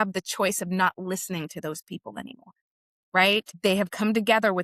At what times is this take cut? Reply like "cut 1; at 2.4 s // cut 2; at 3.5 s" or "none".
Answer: cut 1; at 3.5 s